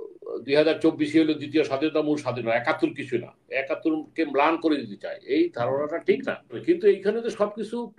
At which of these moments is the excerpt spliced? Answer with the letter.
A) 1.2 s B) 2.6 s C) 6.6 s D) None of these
C